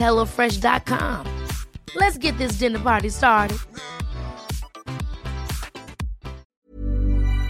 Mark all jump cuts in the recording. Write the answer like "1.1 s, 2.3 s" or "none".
6.5 s